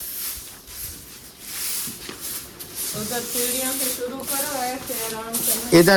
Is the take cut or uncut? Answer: uncut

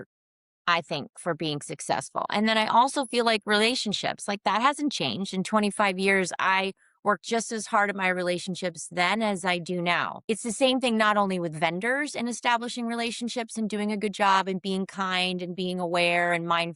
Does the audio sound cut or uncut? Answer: cut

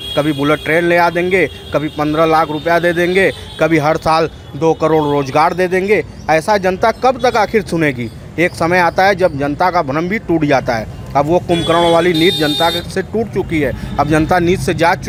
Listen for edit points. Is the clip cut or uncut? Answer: uncut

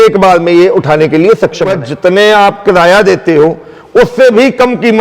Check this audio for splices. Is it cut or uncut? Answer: cut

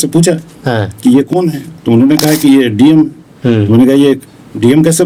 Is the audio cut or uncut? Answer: uncut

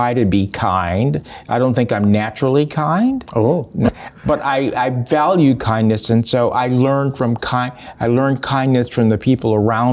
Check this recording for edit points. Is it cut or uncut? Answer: uncut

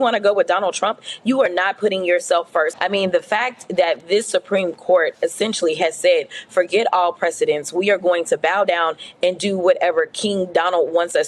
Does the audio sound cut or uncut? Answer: cut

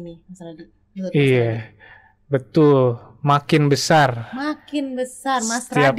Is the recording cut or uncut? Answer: uncut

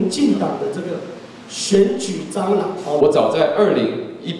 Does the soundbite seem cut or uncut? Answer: cut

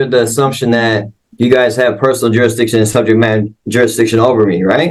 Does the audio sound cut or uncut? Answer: uncut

